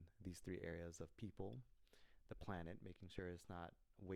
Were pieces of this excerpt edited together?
no; 0 cuts

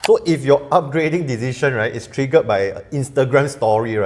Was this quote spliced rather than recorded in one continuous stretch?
no; 0 cuts

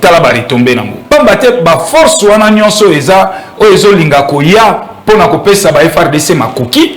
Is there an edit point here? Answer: yes; 1 cut; at 0.9 s

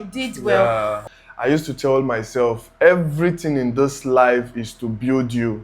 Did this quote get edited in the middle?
yes; 1 cut; at 1.0 s

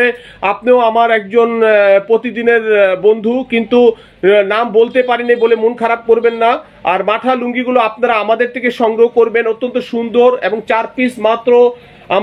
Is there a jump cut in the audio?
no; 0 cuts

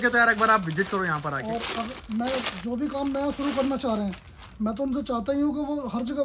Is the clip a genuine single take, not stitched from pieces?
yes; 0 cuts

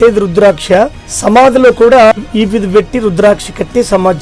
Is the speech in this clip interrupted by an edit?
yes; 2 cuts; at 1.0 s, 2.1 s

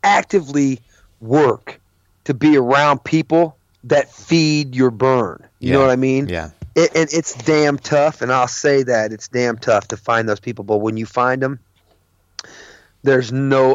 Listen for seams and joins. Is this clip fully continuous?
yes; 0 cuts

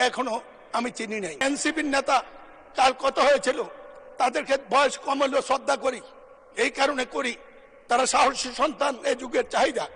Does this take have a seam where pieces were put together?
yes; 1 cut; at 1.4 s

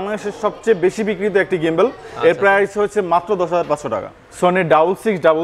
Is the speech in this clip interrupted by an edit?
yes; 1 cut; at 4.1 s

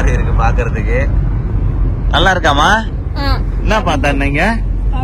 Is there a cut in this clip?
no; 0 cuts

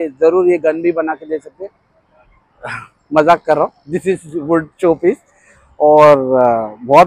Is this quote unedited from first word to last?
yes; 0 cuts

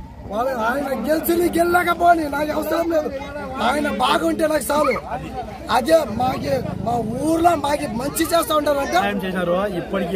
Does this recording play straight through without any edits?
no; 1 cut; at 9.1 s

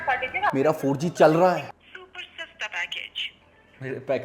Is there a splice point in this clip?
yes; 1 cut; at 1.6 s

